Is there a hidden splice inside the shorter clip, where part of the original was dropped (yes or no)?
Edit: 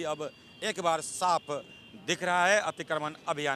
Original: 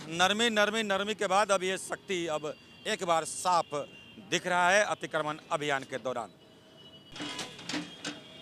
no